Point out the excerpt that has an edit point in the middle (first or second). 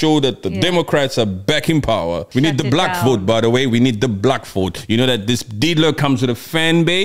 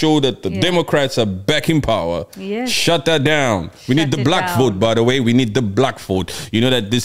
first